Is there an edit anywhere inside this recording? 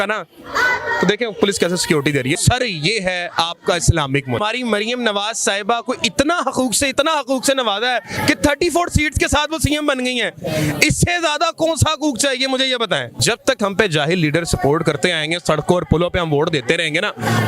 yes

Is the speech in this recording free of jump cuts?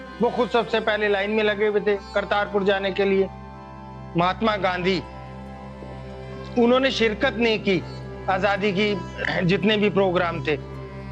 no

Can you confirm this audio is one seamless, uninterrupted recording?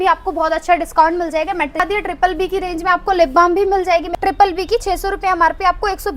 no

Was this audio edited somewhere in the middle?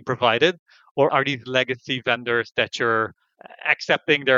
yes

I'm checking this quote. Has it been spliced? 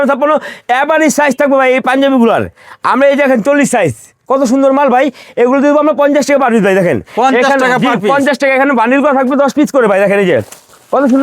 no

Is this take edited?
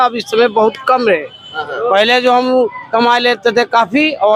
no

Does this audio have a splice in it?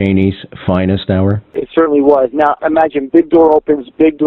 yes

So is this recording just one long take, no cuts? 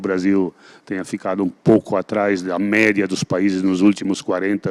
yes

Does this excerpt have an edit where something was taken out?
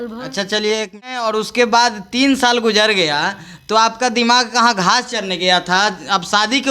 yes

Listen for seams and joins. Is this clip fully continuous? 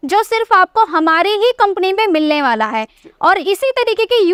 yes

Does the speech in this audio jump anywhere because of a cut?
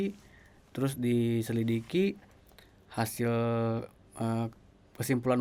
no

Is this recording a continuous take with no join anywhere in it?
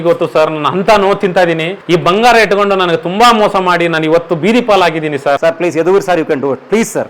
no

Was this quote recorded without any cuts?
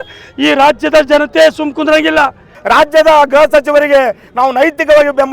no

